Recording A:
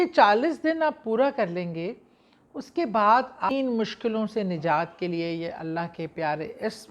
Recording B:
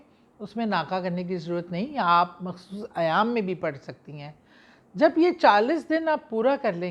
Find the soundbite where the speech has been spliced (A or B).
A